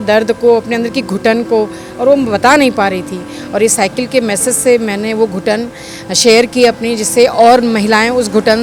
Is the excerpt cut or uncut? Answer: uncut